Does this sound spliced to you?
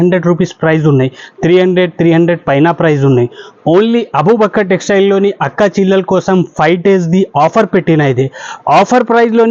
no; 0 cuts

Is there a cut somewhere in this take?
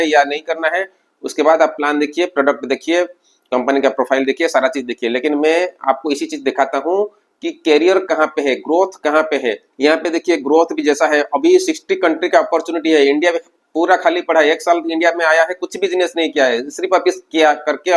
no; 0 cuts

